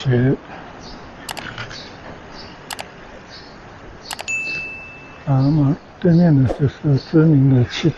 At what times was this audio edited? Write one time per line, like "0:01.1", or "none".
none